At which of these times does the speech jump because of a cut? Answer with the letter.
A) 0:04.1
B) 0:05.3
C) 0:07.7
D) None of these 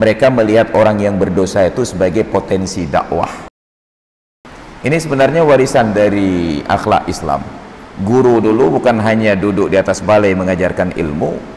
A